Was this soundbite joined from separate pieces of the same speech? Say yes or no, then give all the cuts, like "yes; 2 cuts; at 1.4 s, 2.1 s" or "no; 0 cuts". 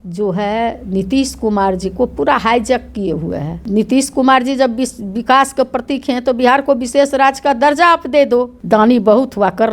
yes; 2 cuts; at 3.6 s, 8.6 s